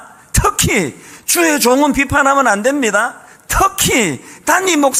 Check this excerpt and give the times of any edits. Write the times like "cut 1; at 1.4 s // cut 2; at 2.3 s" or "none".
none